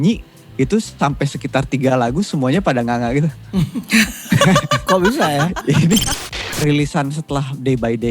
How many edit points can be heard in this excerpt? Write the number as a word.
one